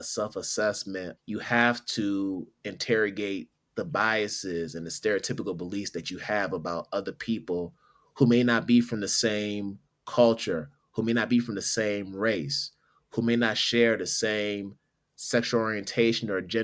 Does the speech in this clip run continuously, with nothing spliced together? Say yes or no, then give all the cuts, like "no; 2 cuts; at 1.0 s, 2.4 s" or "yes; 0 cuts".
no; 1 cut; at 1.1 s